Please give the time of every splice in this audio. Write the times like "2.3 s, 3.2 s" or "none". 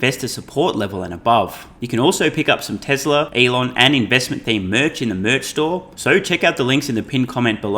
1.7 s, 3.3 s, 5.9 s